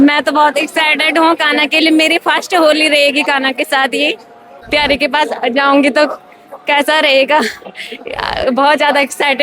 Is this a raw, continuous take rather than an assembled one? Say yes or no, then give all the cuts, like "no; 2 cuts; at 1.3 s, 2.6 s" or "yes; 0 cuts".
no; 1 cut; at 4.6 s